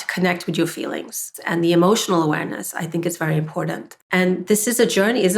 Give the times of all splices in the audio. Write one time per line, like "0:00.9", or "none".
0:01.3
0:03.9